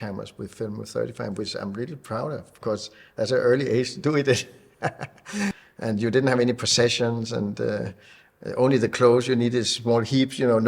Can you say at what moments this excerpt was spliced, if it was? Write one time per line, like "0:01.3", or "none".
0:05.6